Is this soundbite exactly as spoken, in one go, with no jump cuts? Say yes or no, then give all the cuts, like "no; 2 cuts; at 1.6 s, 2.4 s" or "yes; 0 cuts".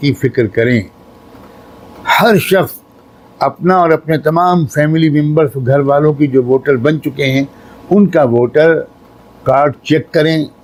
yes; 0 cuts